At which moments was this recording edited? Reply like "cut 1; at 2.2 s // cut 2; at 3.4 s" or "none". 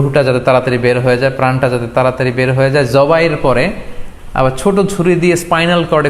none